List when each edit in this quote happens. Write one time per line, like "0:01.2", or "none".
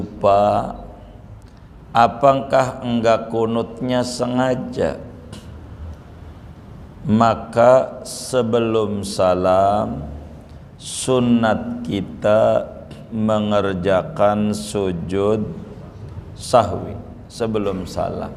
none